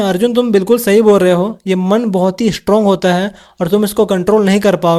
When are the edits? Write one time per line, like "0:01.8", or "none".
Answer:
none